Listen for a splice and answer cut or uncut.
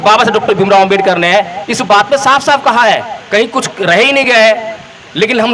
uncut